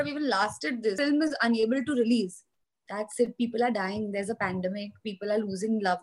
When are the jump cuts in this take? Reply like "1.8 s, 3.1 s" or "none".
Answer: 1.0 s